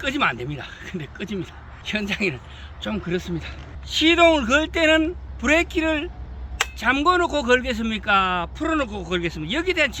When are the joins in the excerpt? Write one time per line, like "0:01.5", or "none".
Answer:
0:03.7